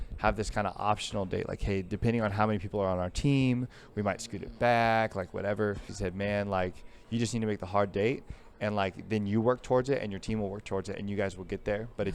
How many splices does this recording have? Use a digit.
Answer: 1